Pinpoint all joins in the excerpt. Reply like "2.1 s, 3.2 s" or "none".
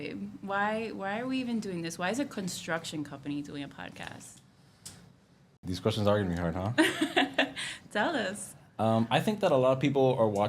5.6 s